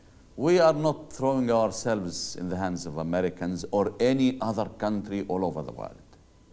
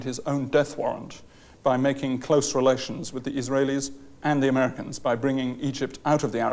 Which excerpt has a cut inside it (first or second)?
second